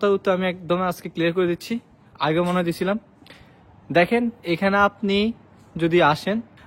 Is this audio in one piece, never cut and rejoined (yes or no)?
yes